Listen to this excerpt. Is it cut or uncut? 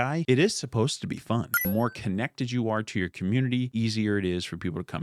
cut